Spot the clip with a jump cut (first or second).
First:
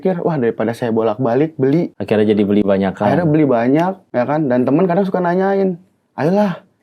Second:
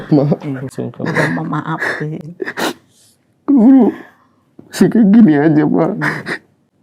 first